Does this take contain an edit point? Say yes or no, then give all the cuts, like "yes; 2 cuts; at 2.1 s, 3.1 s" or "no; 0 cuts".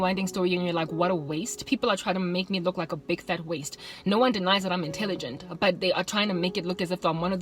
no; 0 cuts